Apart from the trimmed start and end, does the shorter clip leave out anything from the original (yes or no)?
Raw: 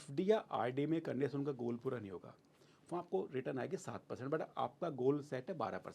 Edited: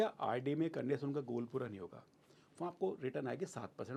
no